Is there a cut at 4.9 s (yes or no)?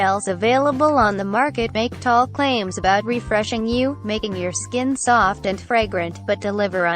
no